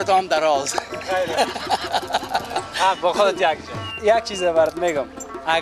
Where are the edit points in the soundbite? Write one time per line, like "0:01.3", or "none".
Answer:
0:03.8